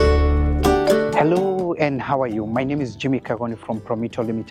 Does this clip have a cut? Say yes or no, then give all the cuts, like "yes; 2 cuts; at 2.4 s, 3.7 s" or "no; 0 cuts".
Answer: no; 0 cuts